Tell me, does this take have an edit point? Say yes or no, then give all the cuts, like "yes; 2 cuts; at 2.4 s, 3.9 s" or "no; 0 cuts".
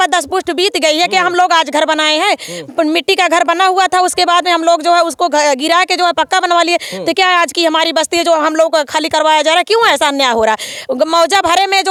no; 0 cuts